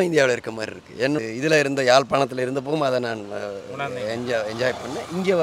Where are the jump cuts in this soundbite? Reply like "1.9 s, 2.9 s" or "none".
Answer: 1.2 s